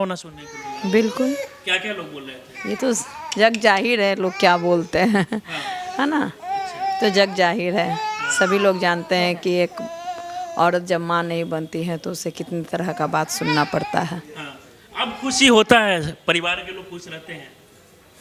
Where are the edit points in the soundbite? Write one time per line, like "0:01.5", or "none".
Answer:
none